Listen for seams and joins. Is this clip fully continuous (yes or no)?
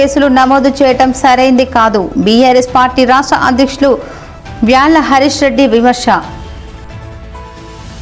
yes